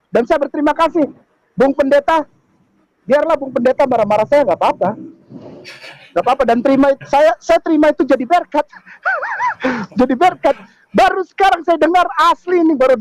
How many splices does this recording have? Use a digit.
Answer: 0